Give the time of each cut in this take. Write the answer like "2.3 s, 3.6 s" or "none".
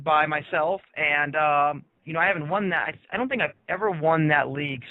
2.9 s